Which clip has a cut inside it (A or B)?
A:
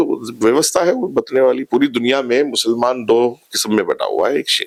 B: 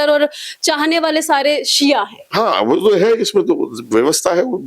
B